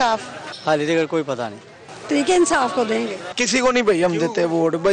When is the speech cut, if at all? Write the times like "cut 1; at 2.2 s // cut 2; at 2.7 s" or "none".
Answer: none